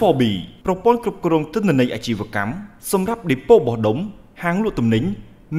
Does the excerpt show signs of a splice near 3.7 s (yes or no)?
no